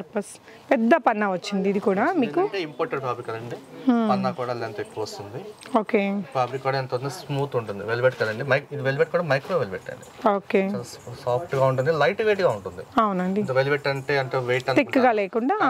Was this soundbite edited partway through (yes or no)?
no